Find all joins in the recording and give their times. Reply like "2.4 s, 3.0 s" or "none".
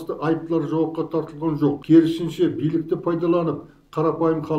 1.8 s